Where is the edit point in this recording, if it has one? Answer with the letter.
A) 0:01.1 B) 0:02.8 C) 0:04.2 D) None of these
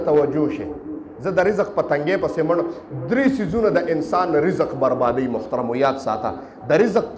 D